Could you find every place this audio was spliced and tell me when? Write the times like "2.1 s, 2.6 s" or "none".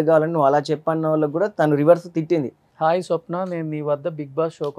2.6 s